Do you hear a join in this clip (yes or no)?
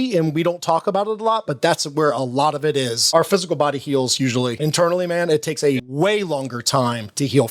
yes